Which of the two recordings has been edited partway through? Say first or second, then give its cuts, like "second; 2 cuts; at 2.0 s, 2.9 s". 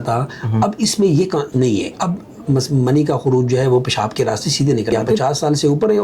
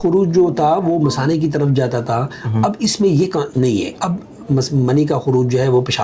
first; 1 cut; at 5.1 s